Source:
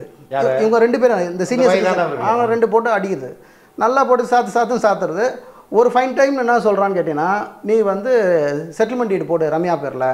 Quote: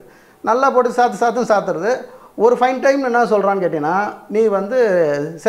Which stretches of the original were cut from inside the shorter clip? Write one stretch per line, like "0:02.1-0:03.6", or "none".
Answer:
none